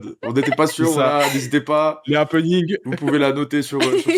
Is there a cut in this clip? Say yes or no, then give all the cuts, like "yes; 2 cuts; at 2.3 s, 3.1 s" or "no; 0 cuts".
no; 0 cuts